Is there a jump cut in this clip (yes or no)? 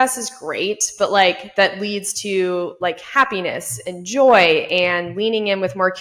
no